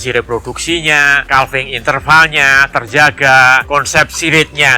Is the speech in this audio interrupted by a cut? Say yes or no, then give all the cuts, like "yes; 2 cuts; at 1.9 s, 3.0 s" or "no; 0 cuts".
yes; 2 cuts; at 1.2 s, 3.6 s